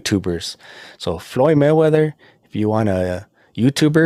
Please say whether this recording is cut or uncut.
uncut